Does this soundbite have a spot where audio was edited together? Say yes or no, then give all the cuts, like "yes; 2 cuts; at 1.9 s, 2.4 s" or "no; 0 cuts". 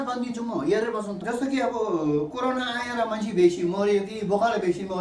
yes; 1 cut; at 1.2 s